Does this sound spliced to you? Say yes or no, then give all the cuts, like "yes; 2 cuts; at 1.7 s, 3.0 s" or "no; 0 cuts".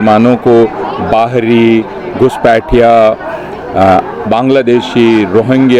no; 0 cuts